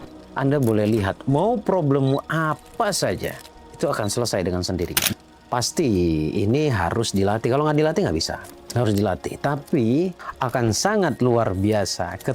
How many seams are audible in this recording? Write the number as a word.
one